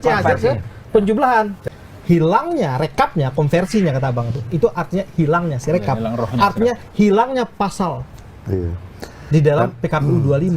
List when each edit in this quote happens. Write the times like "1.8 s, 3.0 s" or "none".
1.6 s